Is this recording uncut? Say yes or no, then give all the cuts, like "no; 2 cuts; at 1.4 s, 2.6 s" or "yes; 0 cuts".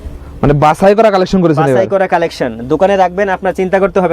yes; 0 cuts